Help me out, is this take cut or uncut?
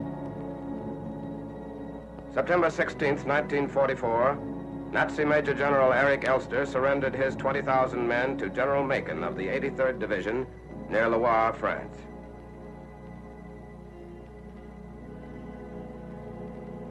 uncut